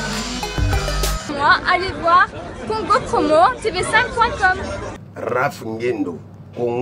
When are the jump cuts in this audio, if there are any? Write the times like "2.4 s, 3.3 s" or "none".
1.3 s